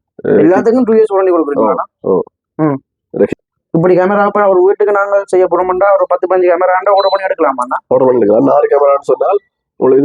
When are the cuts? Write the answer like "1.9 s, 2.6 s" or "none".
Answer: 3.3 s